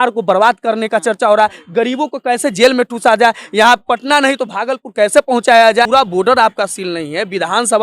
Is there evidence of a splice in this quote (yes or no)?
yes